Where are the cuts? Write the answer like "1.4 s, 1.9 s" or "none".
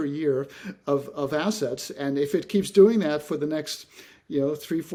none